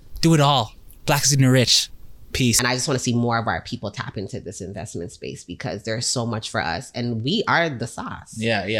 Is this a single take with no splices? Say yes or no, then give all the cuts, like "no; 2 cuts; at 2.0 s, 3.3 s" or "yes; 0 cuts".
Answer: no; 1 cut; at 2.5 s